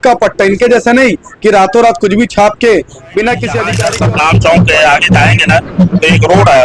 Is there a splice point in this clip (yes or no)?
yes